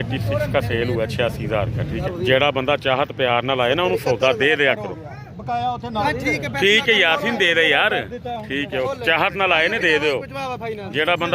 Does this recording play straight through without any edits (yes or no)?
no